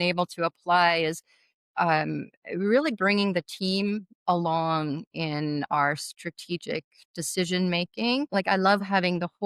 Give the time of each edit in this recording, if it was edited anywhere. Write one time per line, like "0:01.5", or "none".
0:08.3